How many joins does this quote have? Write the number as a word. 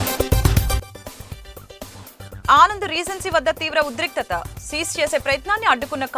one